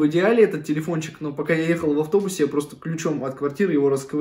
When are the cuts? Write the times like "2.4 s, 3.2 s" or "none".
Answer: none